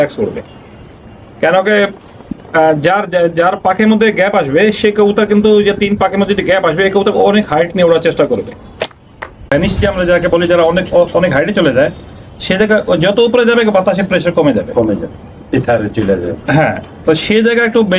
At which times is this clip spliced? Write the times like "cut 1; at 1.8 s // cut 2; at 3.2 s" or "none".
cut 1; at 9.4 s